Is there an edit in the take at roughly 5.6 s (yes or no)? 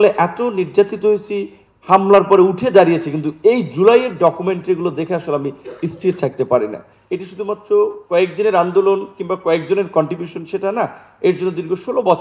no